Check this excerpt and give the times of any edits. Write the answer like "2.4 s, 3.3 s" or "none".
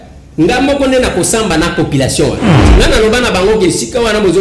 2.6 s